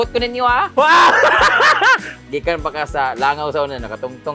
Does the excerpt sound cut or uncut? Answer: cut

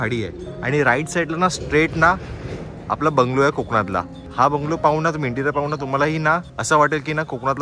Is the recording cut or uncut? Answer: cut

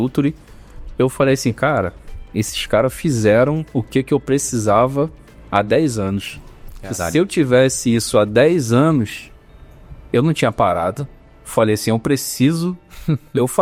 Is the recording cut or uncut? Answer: uncut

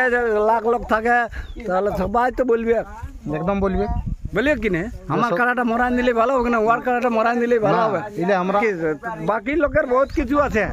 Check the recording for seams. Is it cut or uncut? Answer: cut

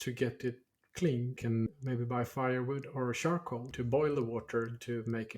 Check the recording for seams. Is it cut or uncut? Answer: cut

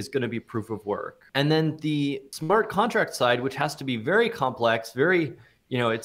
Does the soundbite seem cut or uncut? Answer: cut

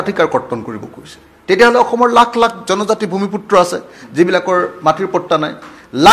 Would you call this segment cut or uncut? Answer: uncut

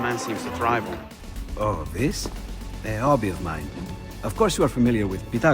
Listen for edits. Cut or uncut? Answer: cut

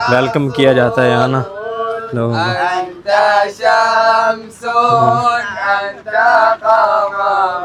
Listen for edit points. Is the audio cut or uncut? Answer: uncut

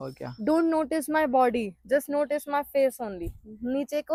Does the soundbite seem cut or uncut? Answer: uncut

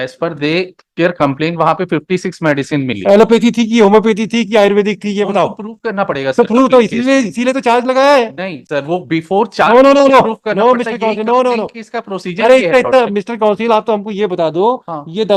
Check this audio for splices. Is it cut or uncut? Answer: uncut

